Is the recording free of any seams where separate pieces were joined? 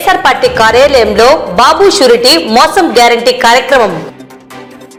yes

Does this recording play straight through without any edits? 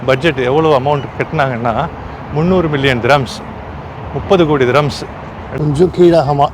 no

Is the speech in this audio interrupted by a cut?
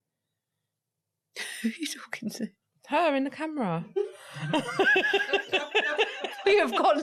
no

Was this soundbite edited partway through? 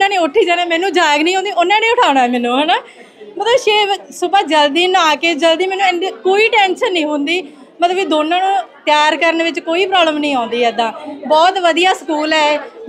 no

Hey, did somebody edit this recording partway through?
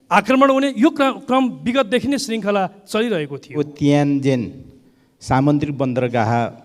yes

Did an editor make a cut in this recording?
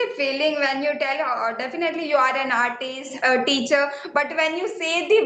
no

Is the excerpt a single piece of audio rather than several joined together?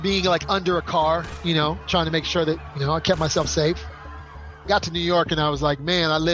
no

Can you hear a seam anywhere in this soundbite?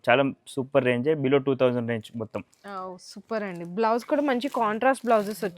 no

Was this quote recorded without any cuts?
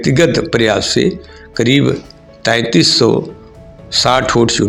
yes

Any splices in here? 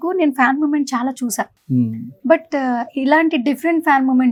no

